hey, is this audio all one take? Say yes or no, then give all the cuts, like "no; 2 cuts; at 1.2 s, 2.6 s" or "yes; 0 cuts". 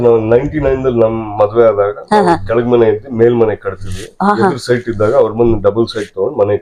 yes; 0 cuts